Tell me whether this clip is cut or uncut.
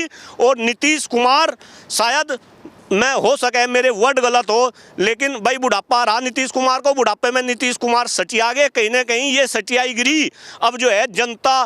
uncut